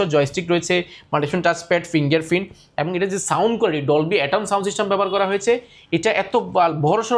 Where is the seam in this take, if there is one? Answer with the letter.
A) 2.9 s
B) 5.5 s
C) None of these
C